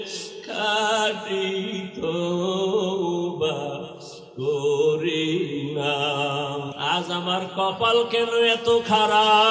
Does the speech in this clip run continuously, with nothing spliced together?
no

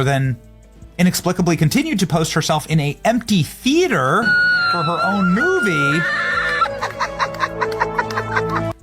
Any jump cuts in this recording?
no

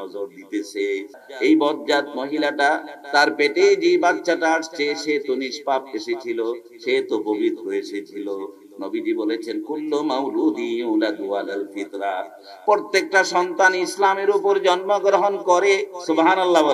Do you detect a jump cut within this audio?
yes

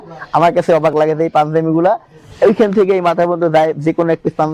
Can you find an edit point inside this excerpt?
no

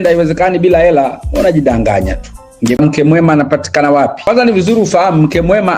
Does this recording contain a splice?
yes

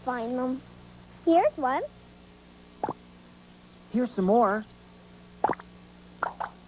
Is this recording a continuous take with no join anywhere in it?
yes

